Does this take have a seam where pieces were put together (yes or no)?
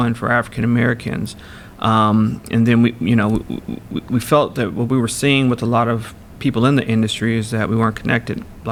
no